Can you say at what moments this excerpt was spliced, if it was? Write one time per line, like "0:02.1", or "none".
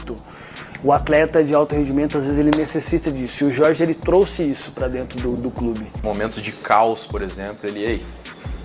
0:05.9

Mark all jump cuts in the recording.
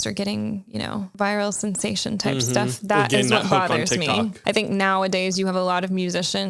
0:01.1
0:04.4

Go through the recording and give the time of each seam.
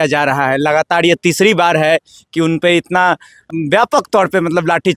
0:03.5

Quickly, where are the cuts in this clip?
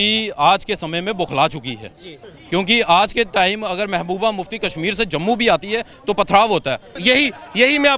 0:02.2
0:07.0

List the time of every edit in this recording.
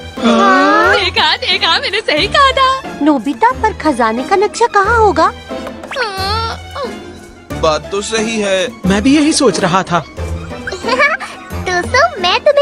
none

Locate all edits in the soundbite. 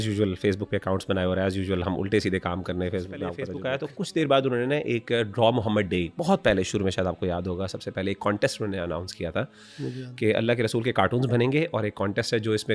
0:03.5

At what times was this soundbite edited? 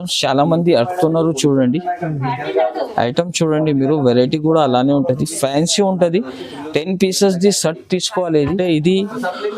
0:08.5

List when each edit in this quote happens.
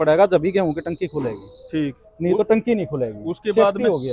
none

